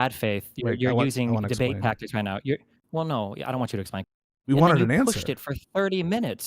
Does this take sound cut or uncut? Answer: cut